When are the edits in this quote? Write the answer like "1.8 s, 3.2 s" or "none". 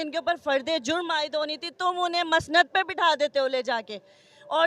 none